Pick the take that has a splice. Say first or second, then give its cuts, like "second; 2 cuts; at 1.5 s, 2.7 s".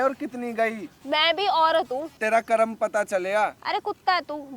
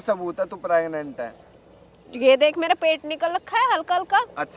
first; 1 cut; at 2.1 s